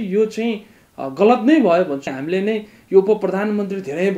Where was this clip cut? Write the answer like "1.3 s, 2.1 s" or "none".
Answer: 2.1 s